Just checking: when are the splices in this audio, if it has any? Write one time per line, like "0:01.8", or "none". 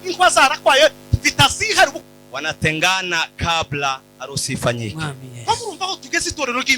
0:02.0